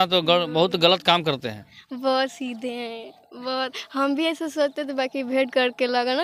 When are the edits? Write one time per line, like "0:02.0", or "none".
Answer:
none